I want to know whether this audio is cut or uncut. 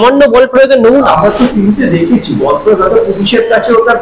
cut